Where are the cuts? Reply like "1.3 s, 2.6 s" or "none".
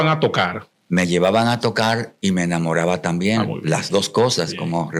none